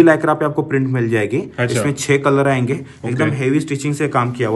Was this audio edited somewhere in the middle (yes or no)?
no